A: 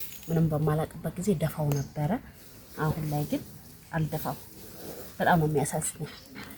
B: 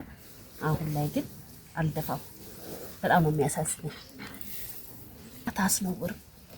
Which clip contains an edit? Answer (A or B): B